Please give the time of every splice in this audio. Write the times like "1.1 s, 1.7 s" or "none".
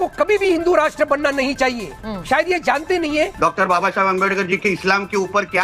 3.3 s